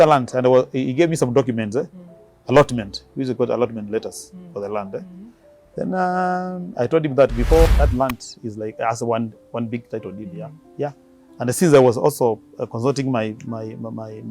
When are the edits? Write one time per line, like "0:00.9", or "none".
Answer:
0:07.7